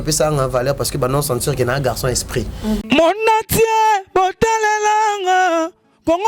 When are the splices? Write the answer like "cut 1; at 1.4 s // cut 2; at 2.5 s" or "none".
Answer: cut 1; at 2.8 s